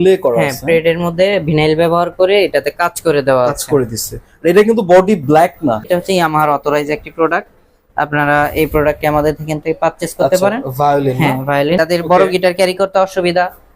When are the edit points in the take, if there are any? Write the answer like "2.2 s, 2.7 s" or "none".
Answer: 5.9 s, 11.8 s